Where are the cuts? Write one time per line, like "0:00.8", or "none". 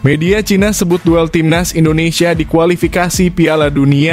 none